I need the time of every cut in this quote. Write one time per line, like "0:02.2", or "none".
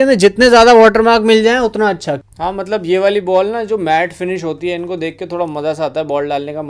0:02.1